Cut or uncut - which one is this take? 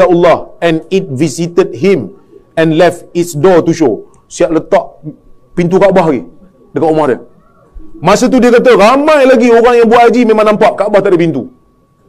uncut